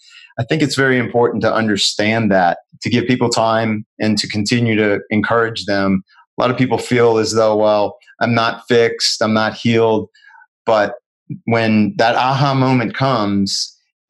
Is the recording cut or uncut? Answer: cut